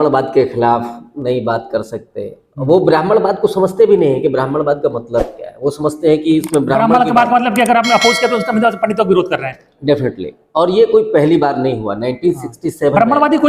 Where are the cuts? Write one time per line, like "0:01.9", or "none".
none